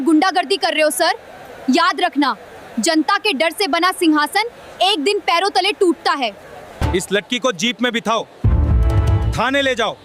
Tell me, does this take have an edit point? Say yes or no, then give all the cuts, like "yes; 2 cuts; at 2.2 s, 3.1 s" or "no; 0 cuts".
no; 0 cuts